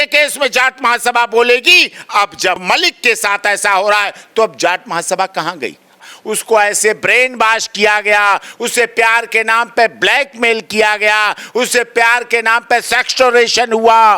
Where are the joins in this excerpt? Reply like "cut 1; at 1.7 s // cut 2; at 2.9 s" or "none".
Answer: cut 1; at 2.6 s // cut 2; at 6.1 s